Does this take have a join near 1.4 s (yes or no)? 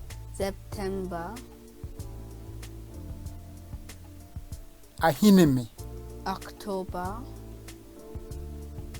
yes